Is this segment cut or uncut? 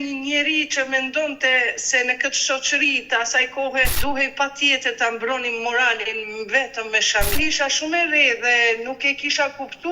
cut